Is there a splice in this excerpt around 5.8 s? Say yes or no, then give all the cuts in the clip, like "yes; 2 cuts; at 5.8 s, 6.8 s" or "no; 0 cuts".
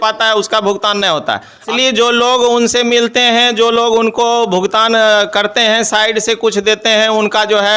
no; 1 cut; at 1.7 s